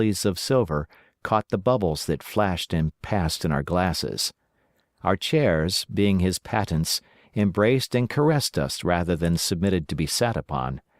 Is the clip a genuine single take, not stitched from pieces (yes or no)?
no